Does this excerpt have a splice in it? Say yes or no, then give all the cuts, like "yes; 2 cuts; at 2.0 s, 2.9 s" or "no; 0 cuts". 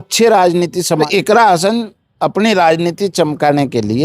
yes; 1 cut; at 1.0 s